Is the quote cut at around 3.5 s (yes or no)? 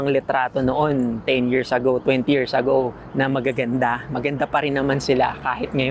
no